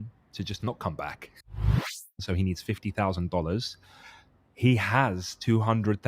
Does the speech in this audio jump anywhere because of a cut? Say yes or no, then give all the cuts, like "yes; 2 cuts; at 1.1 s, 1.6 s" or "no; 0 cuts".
yes; 1 cut; at 1.7 s